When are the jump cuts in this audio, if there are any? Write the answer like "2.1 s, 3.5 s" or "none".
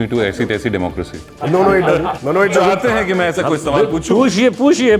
1.2 s, 2.3 s